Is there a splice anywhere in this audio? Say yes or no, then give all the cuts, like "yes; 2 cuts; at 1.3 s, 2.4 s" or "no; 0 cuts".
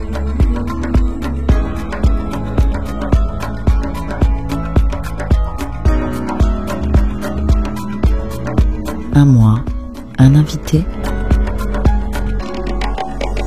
yes; 2 cuts; at 9.1 s, 11.0 s